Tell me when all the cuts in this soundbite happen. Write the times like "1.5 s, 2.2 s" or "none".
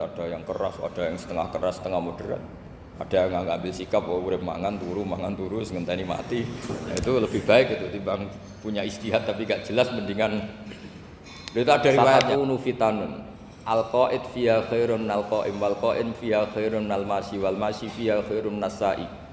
12.1 s